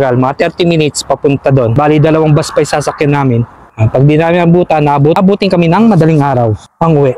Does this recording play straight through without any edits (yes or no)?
no